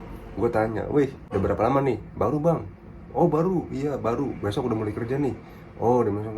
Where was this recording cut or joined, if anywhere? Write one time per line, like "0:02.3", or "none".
0:01.2